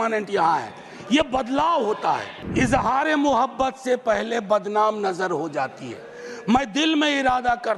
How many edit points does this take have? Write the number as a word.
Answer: one